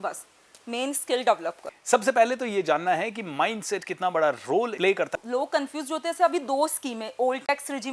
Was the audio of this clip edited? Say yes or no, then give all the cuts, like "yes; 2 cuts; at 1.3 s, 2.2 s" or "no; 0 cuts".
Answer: yes; 2 cuts; at 1.7 s, 5.1 s